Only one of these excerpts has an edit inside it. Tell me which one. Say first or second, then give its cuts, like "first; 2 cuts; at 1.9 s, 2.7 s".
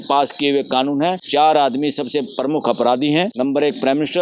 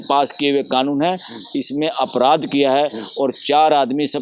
first; 2 cuts; at 1.2 s, 3.3 s